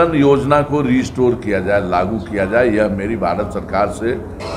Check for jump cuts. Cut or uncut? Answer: uncut